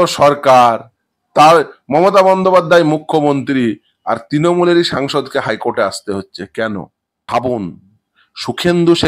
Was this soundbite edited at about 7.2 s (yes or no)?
yes